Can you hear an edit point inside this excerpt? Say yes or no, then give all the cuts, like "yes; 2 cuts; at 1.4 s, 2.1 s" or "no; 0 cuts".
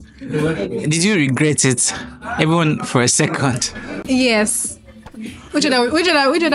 no; 0 cuts